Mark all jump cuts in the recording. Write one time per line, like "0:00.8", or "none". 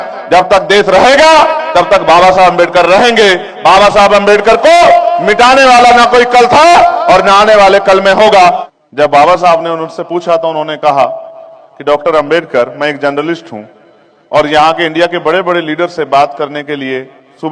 0:08.7